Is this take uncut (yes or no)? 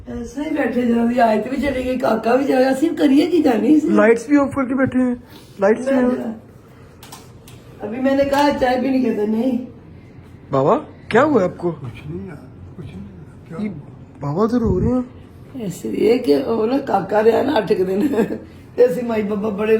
yes